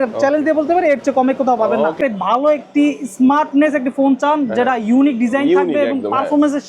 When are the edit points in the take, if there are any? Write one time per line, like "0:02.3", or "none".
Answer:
0:02.0